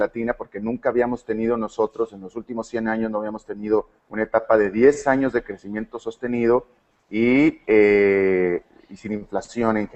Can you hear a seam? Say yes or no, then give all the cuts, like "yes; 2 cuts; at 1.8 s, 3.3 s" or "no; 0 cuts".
no; 0 cuts